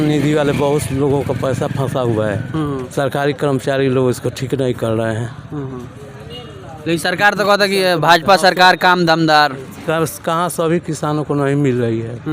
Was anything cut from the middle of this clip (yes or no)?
no